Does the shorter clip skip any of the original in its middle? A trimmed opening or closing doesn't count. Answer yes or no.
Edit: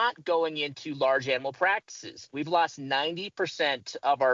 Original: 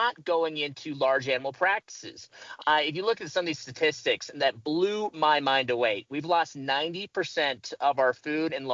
yes